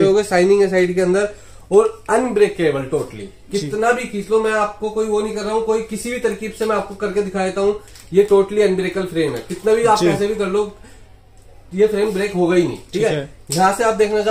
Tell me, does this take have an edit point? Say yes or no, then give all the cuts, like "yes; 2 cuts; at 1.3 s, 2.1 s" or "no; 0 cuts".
no; 0 cuts